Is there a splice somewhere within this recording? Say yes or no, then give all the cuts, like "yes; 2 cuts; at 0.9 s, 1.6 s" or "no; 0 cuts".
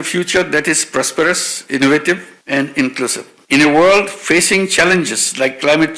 no; 0 cuts